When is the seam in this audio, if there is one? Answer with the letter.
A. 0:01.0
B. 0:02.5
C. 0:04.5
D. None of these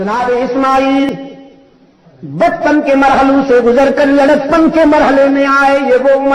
A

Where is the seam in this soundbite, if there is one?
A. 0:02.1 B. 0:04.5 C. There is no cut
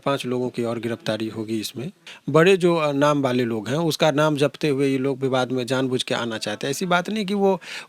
A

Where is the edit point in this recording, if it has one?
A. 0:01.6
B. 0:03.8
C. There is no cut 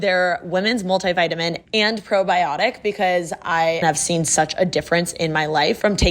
B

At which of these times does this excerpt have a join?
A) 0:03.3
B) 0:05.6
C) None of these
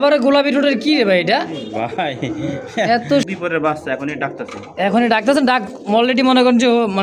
A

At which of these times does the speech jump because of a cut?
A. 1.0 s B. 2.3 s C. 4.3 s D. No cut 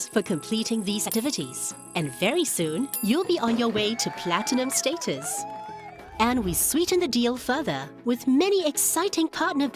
A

